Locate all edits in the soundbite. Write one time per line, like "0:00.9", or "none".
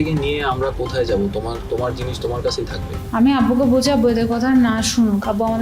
0:02.9